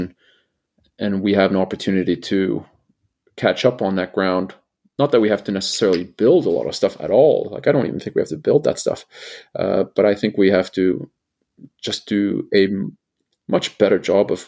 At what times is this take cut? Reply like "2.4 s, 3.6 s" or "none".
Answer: none